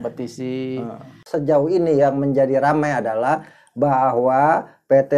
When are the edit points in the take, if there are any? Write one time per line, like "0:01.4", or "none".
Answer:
0:01.1